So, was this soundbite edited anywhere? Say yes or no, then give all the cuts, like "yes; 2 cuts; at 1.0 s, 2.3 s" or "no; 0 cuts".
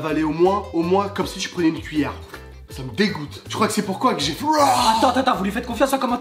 no; 0 cuts